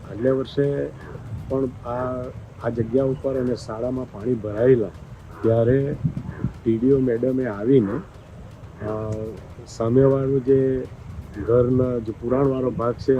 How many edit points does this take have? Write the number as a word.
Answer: zero